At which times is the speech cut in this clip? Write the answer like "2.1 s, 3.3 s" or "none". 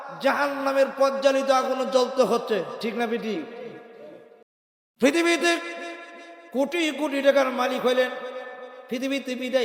4.5 s